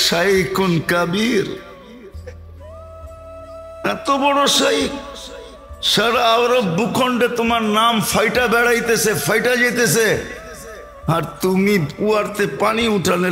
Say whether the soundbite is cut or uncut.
uncut